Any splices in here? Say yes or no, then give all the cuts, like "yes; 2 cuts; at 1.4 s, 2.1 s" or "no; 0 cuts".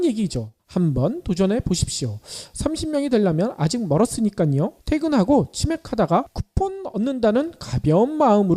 yes; 1 cut; at 6.9 s